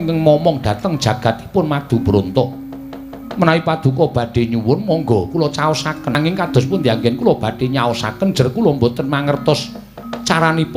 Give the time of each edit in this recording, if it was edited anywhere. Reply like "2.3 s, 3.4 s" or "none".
6.2 s